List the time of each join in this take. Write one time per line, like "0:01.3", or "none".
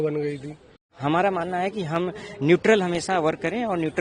0:00.9